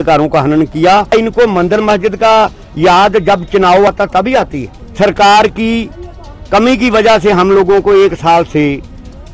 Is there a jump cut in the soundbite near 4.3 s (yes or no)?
yes